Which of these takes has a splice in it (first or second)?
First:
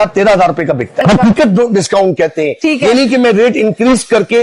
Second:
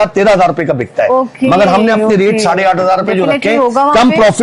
first